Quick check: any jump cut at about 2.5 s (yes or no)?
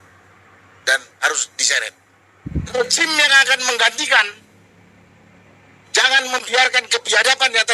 yes